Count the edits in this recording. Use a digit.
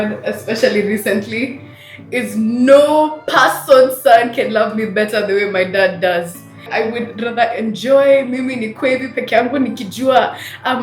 1